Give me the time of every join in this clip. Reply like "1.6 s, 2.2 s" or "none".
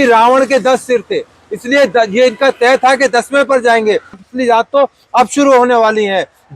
4.2 s